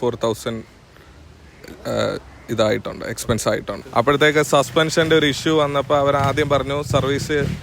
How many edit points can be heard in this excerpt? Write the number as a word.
one